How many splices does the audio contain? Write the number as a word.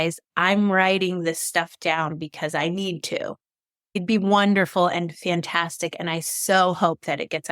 one